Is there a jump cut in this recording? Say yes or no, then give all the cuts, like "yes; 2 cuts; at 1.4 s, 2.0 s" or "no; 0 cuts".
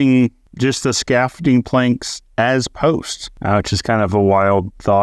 no; 0 cuts